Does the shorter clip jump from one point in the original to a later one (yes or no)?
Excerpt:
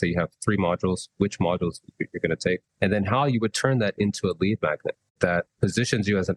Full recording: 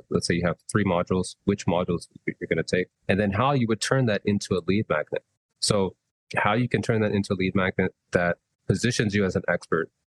yes